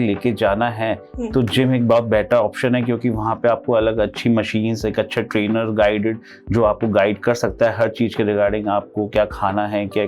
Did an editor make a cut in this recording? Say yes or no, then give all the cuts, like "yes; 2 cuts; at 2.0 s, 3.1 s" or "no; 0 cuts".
no; 0 cuts